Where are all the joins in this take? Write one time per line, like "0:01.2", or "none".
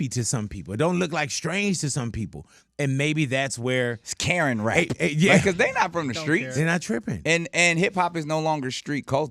0:05.4